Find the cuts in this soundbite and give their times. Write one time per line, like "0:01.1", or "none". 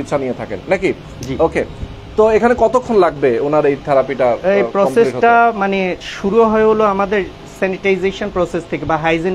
none